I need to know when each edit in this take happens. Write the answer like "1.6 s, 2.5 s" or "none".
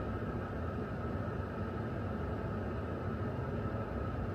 none